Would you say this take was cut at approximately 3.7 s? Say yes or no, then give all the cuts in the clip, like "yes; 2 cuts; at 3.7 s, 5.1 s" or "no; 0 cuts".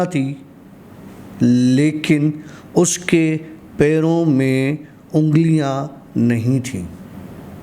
no; 0 cuts